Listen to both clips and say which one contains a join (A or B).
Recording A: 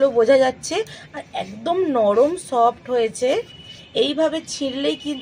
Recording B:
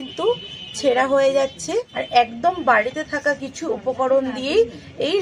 B